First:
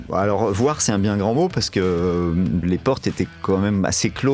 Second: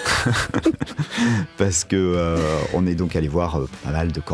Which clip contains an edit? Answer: first; 1 cut; at 2.7 s

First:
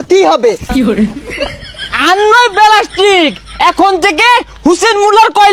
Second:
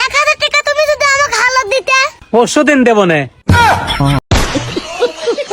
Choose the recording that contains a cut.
second; 1 cut; at 4.2 s

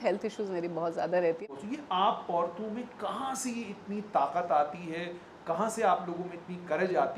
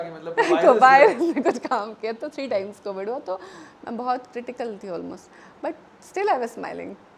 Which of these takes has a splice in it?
first; 1 cut; at 1.4 s

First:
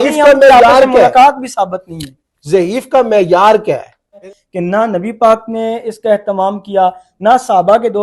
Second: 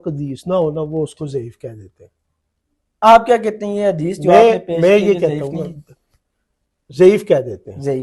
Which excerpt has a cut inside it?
first; 1 cut; at 4.3 s

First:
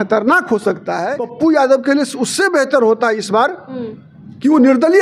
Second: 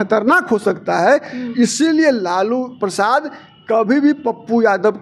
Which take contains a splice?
first; 1 cut; at 1.0 s

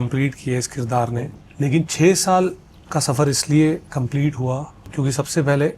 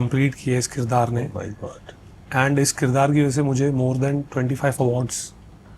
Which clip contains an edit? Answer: first; 2 cuts; at 1.4 s, 4.8 s

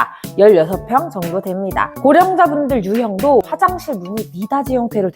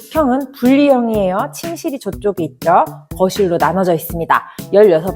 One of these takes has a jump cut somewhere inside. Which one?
first; 2 cuts; at 1.9 s, 3.5 s

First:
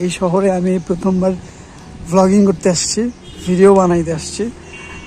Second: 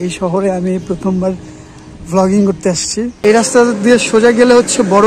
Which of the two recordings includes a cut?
second; 1 cut; at 3.1 s

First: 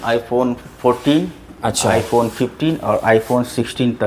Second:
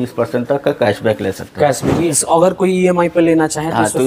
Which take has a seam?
second; 1 cut; at 2.1 s

